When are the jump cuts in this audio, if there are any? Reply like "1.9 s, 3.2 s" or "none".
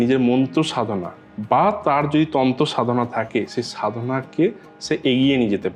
none